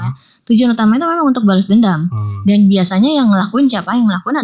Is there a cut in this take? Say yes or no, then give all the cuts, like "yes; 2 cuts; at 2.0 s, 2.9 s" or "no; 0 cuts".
no; 0 cuts